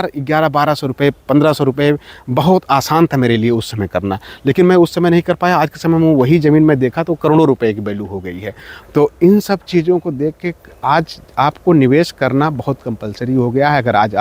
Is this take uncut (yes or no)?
yes